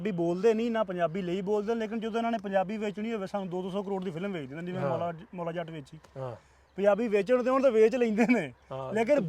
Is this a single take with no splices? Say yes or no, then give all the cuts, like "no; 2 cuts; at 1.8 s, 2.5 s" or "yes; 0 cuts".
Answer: yes; 0 cuts